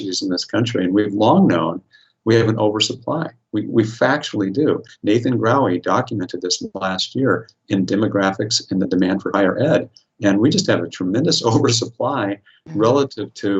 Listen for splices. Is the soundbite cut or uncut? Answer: uncut